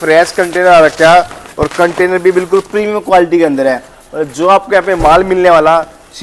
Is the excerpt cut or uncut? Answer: uncut